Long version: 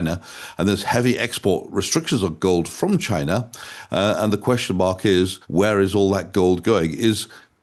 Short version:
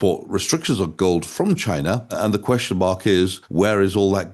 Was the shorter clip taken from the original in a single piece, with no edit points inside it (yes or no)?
no